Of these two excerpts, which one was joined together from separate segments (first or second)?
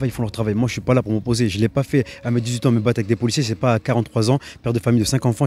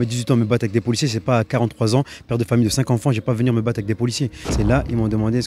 second